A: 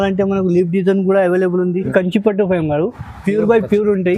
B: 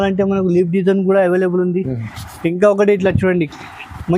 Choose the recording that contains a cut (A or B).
A